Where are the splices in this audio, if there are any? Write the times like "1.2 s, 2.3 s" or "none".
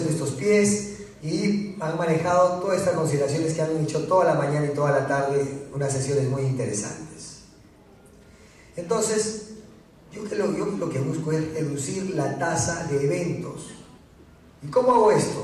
3.5 s